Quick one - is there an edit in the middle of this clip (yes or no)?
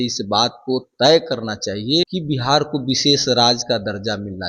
yes